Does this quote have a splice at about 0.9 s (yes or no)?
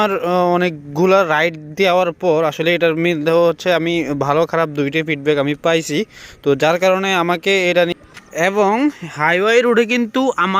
no